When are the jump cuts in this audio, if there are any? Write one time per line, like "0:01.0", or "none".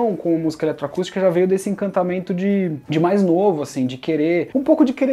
none